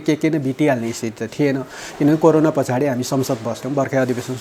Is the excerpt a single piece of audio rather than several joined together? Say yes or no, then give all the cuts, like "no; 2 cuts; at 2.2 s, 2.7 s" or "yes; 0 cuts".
yes; 0 cuts